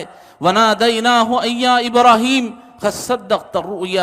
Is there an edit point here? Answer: no; 0 cuts

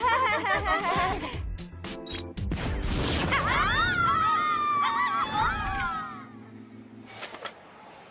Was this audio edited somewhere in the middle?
yes; 1 cut; at 7.2 s

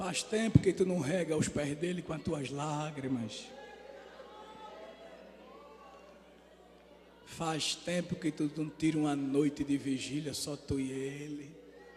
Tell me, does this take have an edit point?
no; 0 cuts

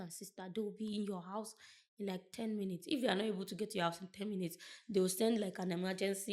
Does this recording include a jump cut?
no; 0 cuts

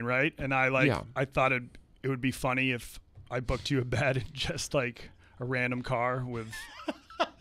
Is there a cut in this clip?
no; 0 cuts

